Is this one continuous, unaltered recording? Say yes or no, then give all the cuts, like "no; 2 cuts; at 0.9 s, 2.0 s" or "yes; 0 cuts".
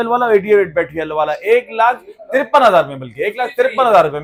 yes; 0 cuts